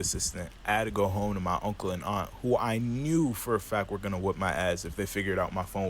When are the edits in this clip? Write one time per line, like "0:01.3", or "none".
0:04.4